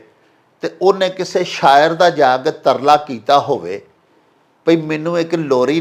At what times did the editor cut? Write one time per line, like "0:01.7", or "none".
none